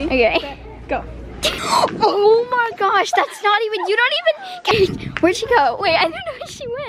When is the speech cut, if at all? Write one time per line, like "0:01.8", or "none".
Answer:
0:01.6
0:04.7